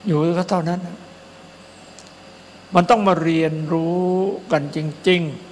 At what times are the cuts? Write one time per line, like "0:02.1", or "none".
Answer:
none